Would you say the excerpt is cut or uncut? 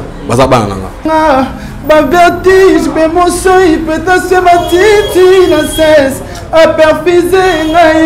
cut